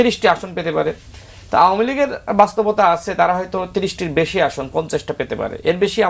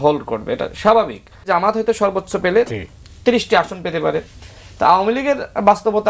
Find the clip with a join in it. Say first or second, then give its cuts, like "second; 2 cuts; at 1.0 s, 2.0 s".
second; 1 cut; at 1.5 s